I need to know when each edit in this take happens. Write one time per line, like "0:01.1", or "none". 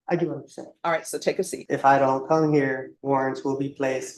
0:01.6
0:02.9